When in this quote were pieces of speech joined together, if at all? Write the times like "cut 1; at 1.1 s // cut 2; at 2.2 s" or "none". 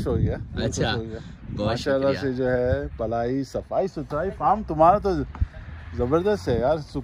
none